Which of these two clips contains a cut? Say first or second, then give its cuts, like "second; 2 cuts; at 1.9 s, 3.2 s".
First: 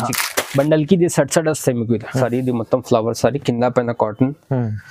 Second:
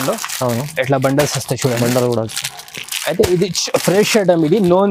first; 1 cut; at 2.2 s